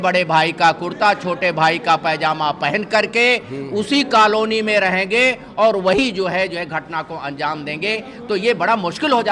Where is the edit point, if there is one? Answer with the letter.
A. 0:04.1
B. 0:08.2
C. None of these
C